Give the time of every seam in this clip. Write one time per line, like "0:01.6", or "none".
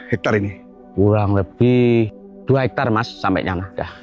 0:02.3